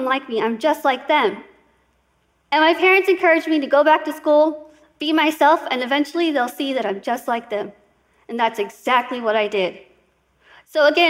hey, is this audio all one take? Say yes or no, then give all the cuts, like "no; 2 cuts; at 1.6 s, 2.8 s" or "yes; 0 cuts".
yes; 0 cuts